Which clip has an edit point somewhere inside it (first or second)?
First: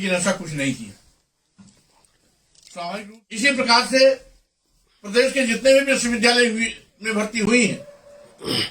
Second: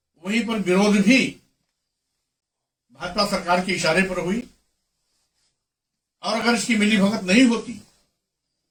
first